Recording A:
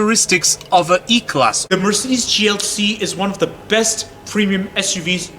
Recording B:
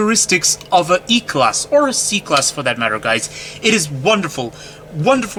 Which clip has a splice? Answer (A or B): A